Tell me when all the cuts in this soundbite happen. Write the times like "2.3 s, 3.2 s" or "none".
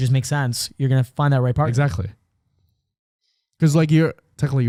none